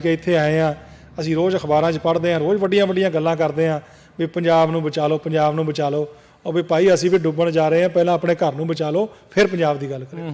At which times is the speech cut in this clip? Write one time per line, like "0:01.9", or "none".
none